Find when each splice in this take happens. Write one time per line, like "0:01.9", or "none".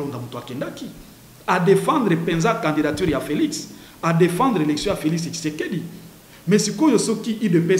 none